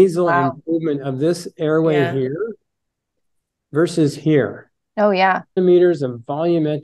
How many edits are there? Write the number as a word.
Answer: one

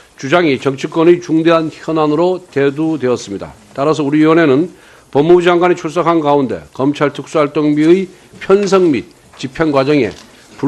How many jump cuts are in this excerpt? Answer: one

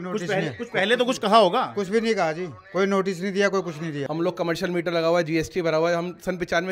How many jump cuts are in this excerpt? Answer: one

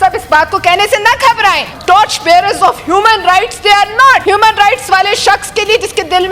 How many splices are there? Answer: two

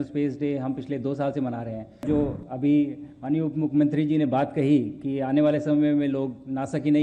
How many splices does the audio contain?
one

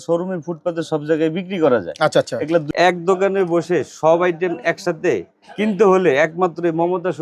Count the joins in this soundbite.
one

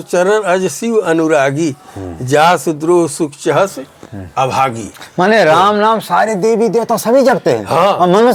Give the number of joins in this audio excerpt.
zero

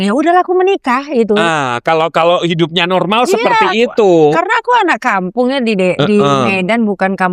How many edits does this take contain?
zero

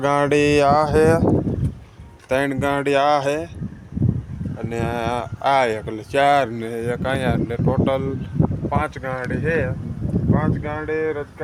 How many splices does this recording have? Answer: zero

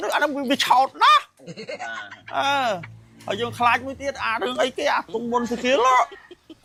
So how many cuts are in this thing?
zero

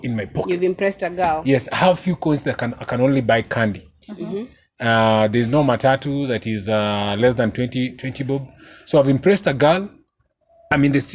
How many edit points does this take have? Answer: zero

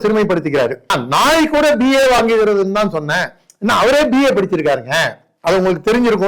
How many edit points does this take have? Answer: one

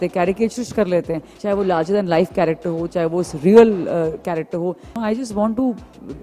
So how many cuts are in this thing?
two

